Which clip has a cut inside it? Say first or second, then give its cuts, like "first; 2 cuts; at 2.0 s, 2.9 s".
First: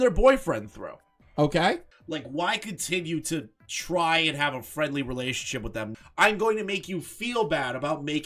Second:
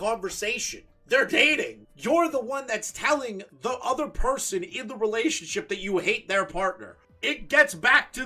first; 2 cuts; at 1.9 s, 5.9 s